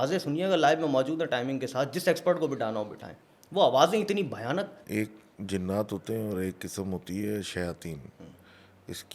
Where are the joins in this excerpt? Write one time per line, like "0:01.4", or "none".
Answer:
0:04.8